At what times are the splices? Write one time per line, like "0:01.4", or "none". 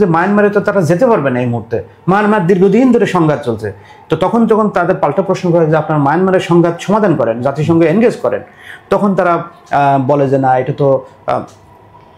none